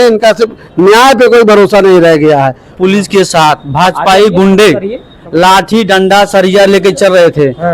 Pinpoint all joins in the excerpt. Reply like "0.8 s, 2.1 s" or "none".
2.7 s